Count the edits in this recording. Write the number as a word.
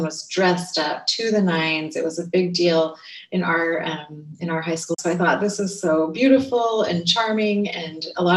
one